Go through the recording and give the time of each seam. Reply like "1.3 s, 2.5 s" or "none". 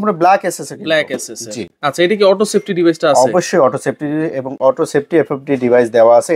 none